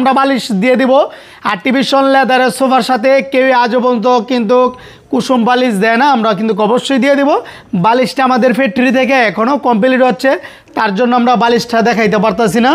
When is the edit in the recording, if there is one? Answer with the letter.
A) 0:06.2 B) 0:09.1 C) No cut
C